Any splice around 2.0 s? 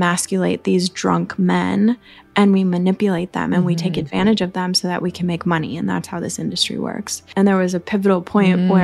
no; 1 cut; at 7.2 s

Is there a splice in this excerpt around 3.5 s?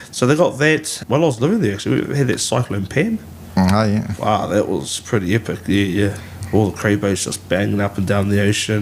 no; 2 cuts; at 0.9 s, 6.3 s

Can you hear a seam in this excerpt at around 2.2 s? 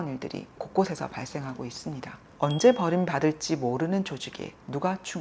yes; 1 cut; at 2.2 s

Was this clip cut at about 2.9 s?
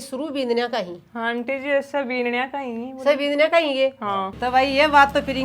no; 0 cuts

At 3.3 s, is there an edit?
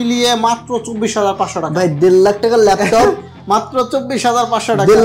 no; 0 cuts

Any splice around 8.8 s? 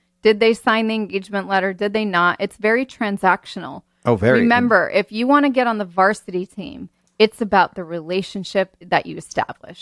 yes; 1 cut; at 8.8 s

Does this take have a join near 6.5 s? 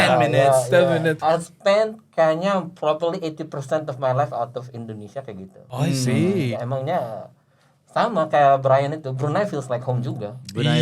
yes; 3 cuts; at 1.2 s, 5.5 s, 6.5 s

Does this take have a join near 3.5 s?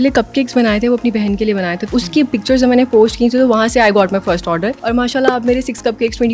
no; 2 cuts; at 1.8 s, 4.8 s

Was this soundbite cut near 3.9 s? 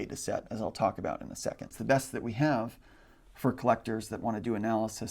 no; 1 cut; at 1.7 s

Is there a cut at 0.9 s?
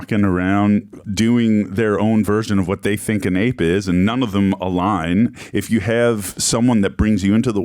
yes; 1 cut; at 0.9 s

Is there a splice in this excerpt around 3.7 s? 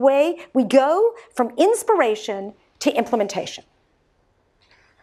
no; 0 cuts

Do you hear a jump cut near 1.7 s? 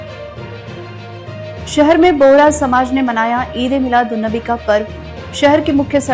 yes; 1 cut; at 1.7 s

